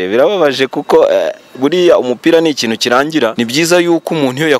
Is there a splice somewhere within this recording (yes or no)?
yes